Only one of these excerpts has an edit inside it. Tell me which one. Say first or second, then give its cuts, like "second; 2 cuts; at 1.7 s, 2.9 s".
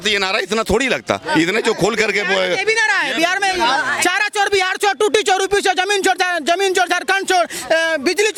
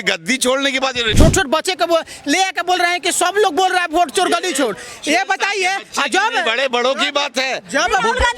second; 1 cut; at 1.0 s